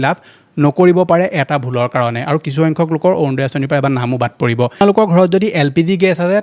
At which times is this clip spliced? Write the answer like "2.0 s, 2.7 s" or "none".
4.8 s